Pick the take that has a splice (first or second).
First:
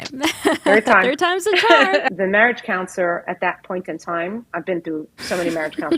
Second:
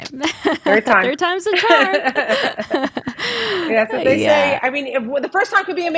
first